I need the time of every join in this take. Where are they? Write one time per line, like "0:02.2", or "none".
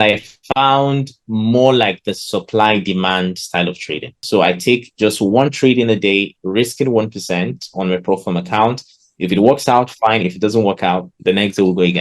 0:04.2